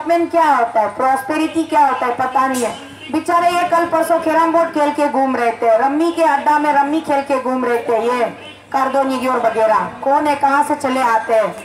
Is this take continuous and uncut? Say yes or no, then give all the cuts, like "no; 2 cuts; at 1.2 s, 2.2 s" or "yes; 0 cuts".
yes; 0 cuts